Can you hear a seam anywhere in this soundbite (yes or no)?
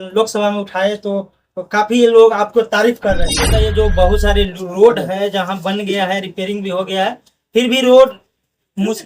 yes